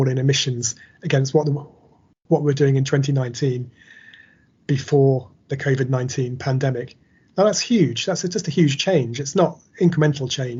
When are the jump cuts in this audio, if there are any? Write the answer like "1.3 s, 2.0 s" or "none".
none